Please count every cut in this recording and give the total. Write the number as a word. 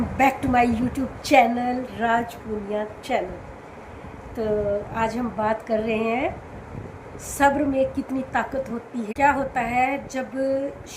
one